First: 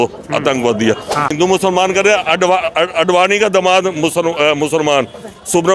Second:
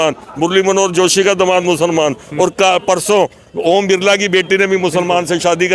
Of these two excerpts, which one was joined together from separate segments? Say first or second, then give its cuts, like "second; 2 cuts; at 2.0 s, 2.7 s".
first; 1 cut; at 1.3 s